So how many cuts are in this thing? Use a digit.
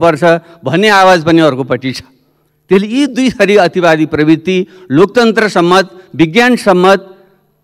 0